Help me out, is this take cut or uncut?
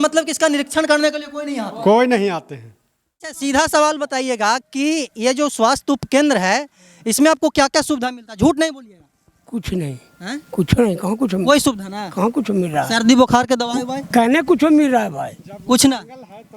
cut